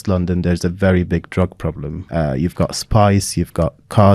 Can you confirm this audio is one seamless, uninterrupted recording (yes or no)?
no